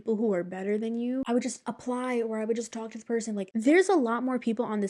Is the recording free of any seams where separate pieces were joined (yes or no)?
no